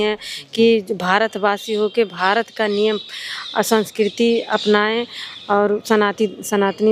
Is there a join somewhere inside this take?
no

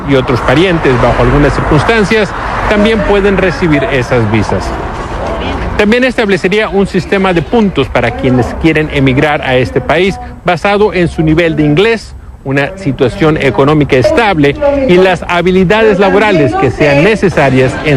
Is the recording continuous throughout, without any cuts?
no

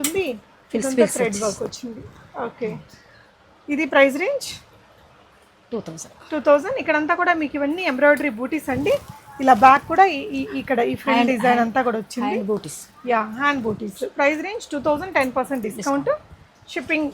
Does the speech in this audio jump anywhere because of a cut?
no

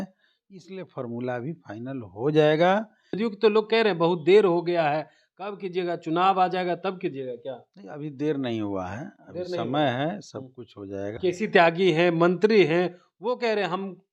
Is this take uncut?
no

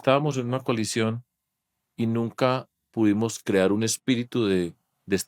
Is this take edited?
no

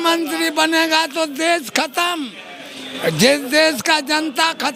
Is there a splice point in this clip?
no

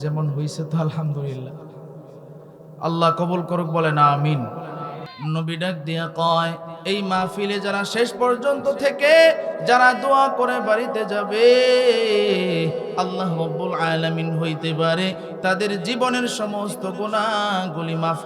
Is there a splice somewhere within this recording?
yes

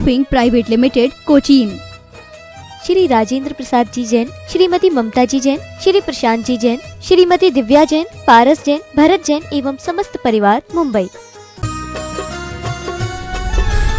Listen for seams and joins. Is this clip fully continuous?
no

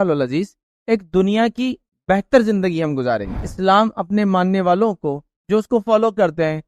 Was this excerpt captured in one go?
no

